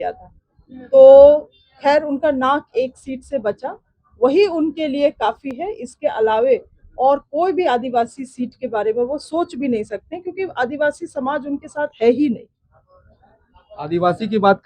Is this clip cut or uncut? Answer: uncut